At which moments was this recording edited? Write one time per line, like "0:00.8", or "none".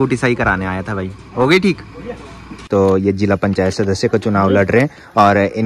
0:02.6